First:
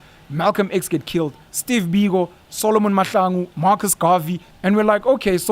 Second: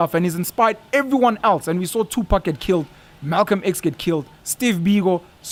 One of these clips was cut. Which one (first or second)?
first